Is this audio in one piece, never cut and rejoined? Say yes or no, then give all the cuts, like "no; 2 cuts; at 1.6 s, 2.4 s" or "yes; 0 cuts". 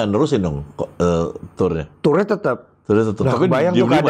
yes; 0 cuts